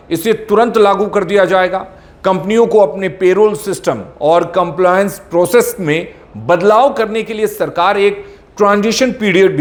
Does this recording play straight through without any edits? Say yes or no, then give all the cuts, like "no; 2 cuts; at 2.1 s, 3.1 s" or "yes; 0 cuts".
yes; 0 cuts